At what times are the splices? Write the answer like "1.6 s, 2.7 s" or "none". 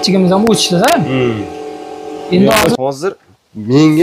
2.8 s